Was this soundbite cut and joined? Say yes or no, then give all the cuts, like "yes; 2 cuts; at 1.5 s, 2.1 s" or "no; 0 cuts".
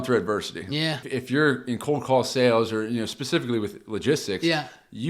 yes; 1 cut; at 1.0 s